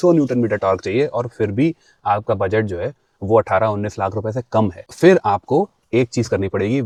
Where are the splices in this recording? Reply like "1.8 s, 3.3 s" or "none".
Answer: none